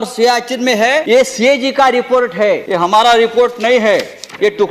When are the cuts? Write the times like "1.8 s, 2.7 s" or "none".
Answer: 1.0 s, 2.6 s